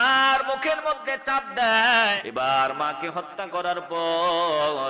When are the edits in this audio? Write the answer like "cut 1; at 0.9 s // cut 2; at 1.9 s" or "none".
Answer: cut 1; at 2.2 s